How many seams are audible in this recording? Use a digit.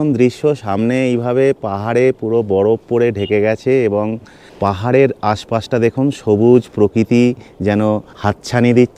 0